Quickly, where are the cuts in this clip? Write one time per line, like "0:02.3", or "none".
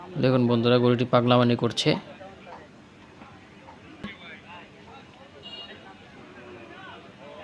0:04.0